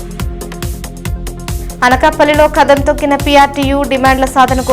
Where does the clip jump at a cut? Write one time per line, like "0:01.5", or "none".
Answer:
0:01.6